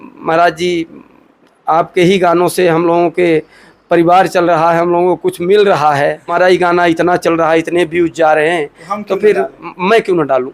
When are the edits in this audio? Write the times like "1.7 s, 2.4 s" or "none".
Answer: 6.3 s